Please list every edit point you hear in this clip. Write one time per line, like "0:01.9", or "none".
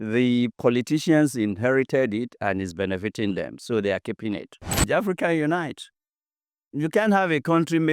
0:04.9